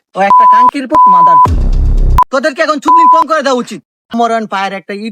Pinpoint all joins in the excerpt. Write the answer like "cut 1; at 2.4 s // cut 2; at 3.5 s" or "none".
cut 1; at 2.2 s // cut 2; at 4.1 s